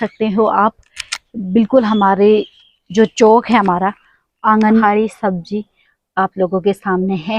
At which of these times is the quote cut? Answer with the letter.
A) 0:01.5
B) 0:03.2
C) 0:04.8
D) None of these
C